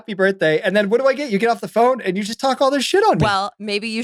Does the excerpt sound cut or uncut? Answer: uncut